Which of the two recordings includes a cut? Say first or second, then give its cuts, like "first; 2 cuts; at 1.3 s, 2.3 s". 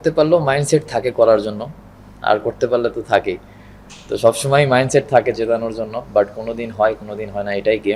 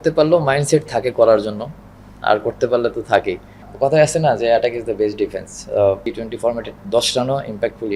second; 2 cuts; at 3.7 s, 6.1 s